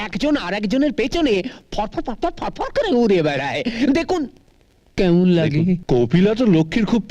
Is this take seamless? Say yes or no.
no